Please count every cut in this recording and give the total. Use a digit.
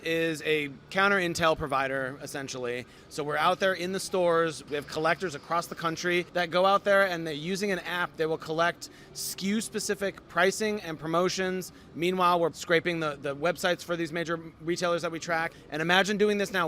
5